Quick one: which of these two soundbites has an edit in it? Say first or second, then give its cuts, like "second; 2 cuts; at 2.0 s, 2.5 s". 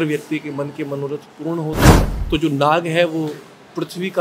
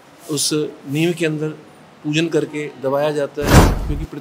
first; 1 cut; at 2.1 s